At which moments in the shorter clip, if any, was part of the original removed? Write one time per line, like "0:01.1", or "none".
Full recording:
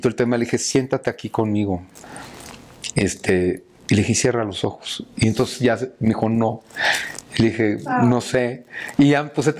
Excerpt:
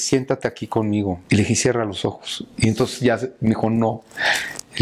0:01.2